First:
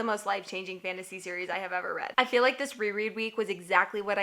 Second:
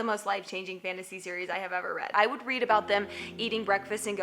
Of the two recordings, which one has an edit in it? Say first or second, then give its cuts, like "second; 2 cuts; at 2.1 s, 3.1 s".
second; 1 cut; at 2.1 s